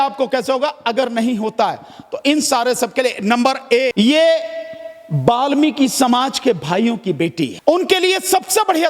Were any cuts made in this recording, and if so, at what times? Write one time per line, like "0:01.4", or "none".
0:03.9
0:07.6